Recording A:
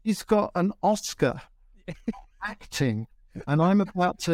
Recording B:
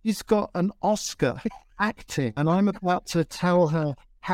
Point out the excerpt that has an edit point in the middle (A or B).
B